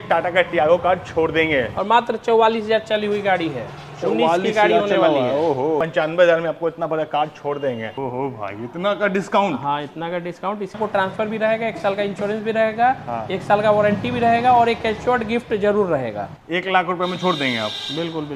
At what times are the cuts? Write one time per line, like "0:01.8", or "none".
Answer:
0:01.7
0:05.8
0:07.9
0:10.8
0:16.3